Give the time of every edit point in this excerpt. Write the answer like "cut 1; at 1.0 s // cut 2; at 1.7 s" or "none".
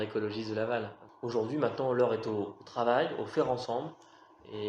cut 1; at 1.0 s